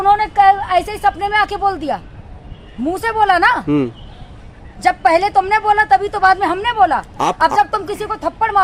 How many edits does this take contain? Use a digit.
0